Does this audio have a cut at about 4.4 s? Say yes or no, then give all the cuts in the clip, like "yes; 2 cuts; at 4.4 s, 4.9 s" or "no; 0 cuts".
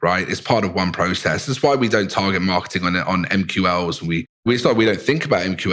yes; 1 cut; at 4.4 s